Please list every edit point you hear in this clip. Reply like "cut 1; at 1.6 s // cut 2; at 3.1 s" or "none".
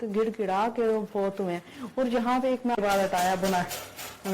cut 1; at 2.8 s